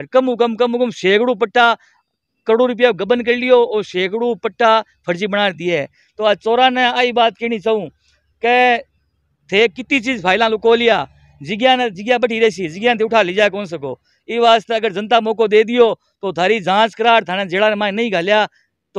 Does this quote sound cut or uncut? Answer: uncut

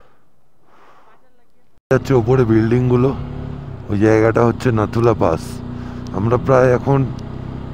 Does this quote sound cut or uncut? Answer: cut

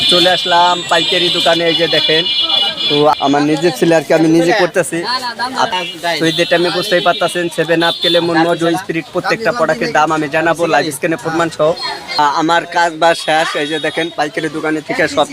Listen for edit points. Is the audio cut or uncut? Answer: cut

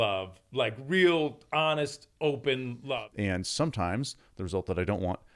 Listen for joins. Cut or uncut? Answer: cut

